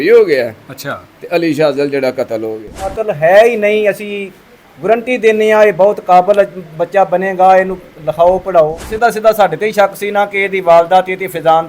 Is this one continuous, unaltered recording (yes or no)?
no